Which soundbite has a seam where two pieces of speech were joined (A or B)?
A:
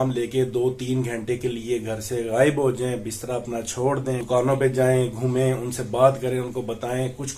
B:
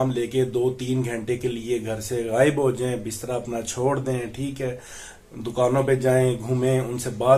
A